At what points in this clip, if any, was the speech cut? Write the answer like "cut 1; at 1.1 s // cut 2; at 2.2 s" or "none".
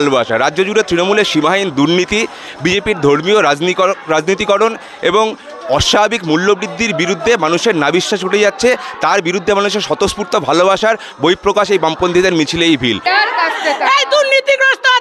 cut 1; at 13.0 s